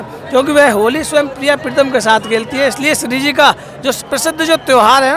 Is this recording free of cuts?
yes; 0 cuts

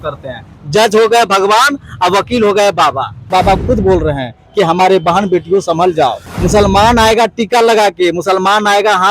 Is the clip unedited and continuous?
no; 2 cuts; at 3.3 s, 6.3 s

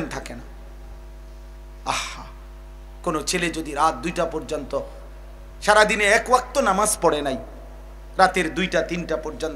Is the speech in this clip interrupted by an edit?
no; 0 cuts

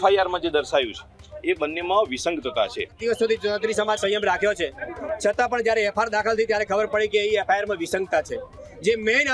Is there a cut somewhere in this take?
yes; 1 cut; at 2.9 s

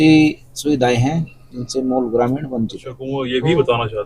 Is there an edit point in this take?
yes; 1 cut; at 3.0 s

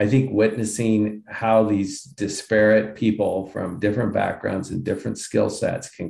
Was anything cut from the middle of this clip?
no; 0 cuts

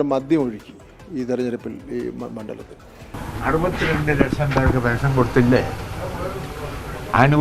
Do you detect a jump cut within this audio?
yes; 1 cut; at 3.1 s

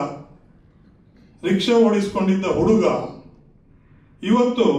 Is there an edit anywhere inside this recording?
no; 0 cuts

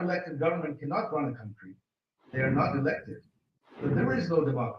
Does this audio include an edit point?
yes; 2 cuts; at 2.3 s, 3.7 s

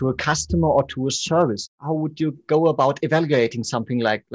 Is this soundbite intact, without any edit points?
no; 1 cut; at 1.8 s

